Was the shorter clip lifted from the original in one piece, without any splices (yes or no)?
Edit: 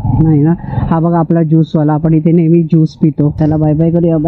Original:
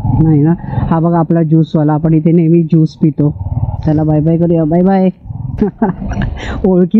no